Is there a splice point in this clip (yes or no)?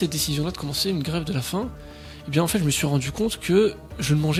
no